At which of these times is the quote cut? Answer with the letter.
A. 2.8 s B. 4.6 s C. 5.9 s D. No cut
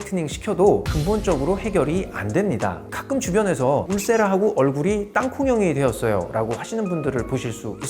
A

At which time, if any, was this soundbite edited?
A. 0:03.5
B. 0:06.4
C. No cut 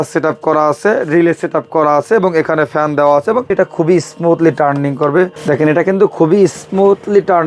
A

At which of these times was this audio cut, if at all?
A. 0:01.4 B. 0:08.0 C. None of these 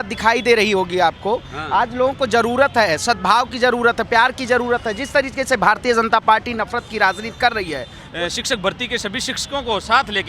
B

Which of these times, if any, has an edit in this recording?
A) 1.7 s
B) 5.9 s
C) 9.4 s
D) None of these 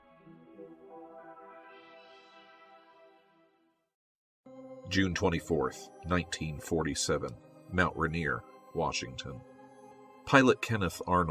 B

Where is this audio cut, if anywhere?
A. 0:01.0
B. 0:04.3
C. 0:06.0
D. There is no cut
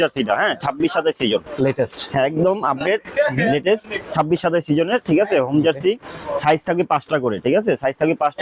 D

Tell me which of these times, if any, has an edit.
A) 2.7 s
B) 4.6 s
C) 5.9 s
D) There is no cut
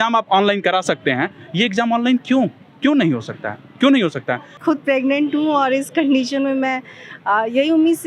B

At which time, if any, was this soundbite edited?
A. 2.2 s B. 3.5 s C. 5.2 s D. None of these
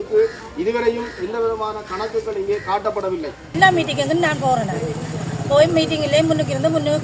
B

